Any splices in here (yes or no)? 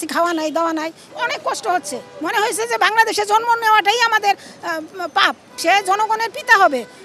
yes